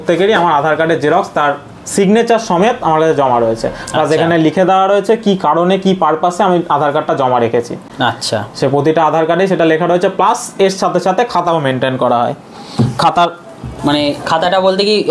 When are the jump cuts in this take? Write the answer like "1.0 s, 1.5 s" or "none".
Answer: none